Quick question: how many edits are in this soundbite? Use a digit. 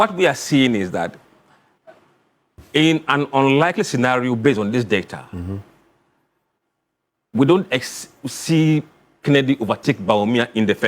0